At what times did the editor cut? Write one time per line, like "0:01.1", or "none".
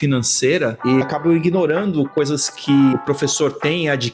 0:01.0
0:02.9